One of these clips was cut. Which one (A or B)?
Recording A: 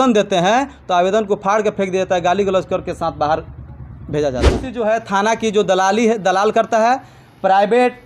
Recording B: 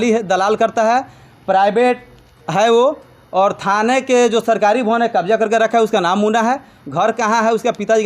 A